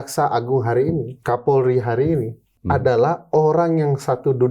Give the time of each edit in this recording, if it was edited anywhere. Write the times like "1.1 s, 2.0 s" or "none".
1.1 s, 2.5 s